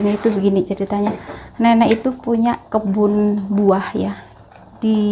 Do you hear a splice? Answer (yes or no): no